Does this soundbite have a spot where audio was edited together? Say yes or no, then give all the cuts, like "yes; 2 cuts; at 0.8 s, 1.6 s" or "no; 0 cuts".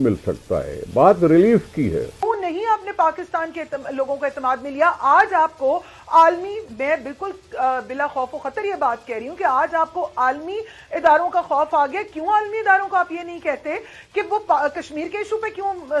yes; 1 cut; at 2.2 s